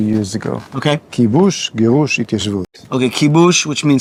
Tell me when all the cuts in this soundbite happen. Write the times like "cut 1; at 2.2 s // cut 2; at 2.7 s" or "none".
none